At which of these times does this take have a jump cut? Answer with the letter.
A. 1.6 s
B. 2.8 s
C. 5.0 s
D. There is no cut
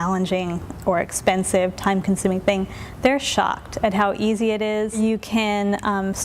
C